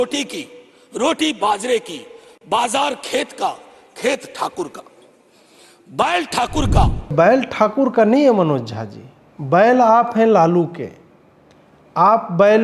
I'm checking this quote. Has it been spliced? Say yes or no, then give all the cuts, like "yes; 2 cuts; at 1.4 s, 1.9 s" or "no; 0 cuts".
yes; 1 cut; at 7.1 s